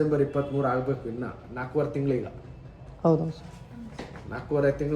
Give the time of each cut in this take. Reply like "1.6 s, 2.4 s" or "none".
none

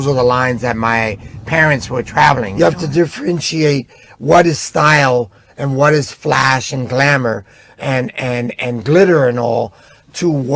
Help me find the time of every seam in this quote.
2.5 s

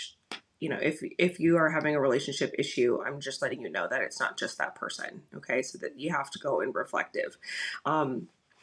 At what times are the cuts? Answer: none

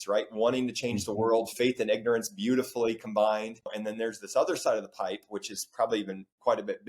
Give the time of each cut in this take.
3.8 s

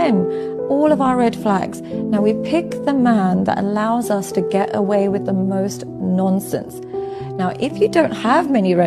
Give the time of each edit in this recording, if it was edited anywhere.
none

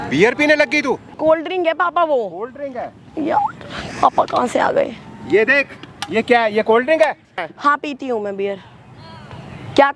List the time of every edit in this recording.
1.1 s, 7.4 s

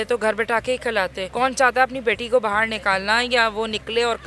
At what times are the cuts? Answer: none

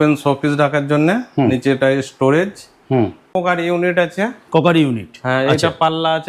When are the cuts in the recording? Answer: 3.3 s

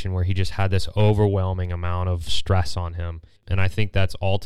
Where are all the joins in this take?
3.4 s

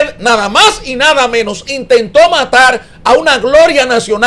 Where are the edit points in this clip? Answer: none

